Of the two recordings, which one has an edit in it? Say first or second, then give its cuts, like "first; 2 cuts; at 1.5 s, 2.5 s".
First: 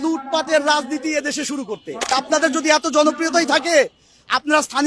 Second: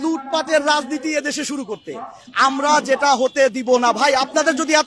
first; 1 cut; at 2.1 s